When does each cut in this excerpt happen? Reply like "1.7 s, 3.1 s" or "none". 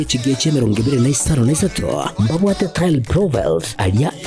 none